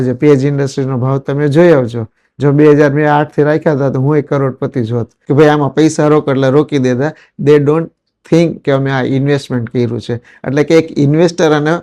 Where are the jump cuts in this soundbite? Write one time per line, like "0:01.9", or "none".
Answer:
0:05.2

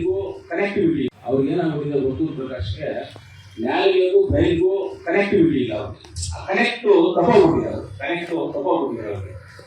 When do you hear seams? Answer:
0:01.2

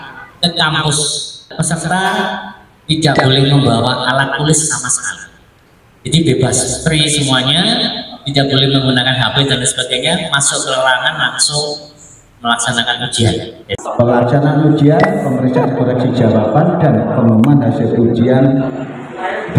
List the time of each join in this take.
0:01.5
0:13.7

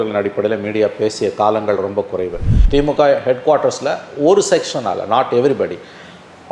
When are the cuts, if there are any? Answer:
0:02.5

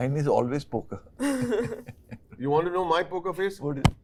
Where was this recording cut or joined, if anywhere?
none

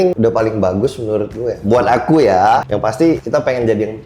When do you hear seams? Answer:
0:02.7

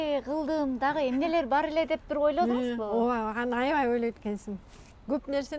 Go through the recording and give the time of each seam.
none

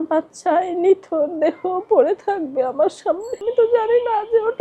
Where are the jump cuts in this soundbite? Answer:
0:03.4

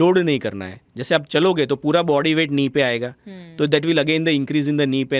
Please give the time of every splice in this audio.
none

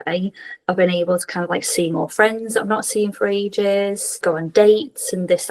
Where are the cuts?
0:04.2

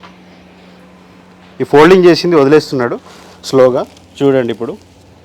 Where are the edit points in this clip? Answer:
0:01.5

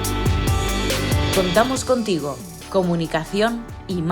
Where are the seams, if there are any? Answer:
0:01.3

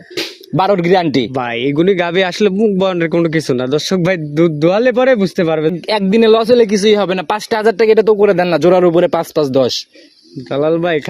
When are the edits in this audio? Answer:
0:05.8

